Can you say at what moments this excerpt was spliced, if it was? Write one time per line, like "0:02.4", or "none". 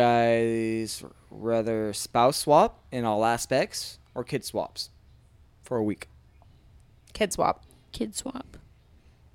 none